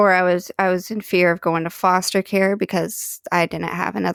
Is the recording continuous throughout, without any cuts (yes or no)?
yes